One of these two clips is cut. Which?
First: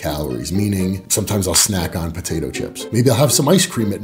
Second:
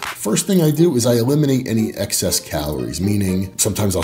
first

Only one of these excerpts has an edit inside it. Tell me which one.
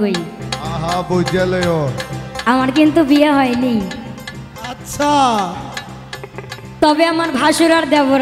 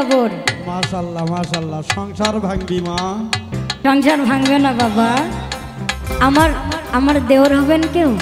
second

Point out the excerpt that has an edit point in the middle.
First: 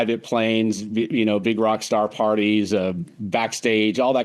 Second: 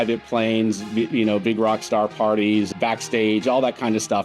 second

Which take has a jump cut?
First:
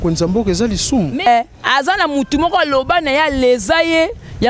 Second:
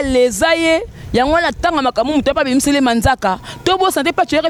first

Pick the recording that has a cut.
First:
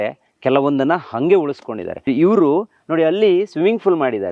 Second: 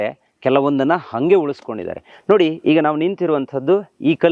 first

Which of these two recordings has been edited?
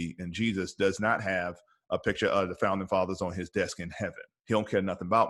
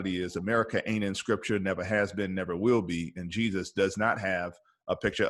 first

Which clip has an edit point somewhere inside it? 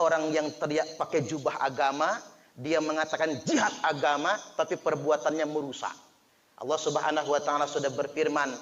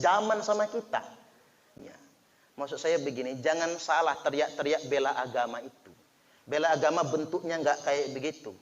second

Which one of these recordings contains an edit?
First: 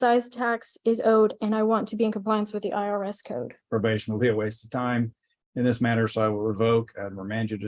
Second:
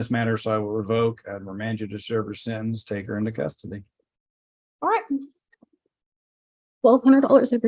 first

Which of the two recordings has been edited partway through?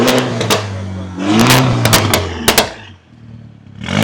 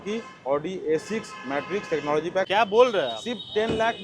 second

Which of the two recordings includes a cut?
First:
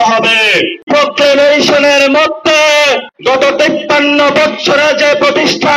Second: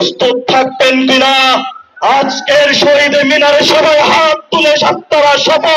first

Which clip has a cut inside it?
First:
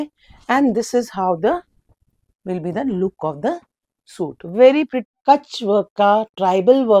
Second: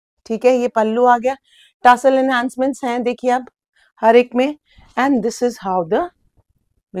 first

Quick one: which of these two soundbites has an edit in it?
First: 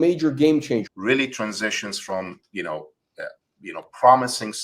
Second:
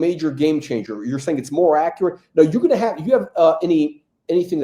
first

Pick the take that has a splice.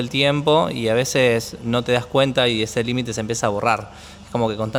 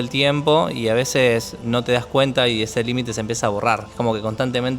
second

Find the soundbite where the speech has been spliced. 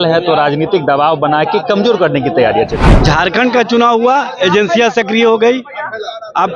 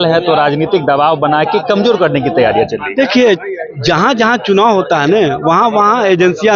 first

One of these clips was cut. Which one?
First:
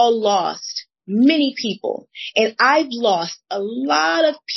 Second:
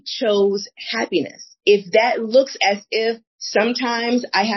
second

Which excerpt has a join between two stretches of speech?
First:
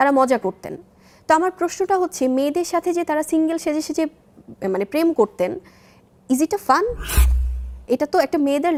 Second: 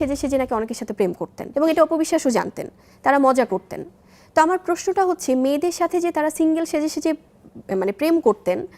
second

